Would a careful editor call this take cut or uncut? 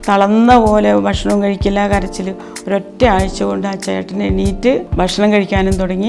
cut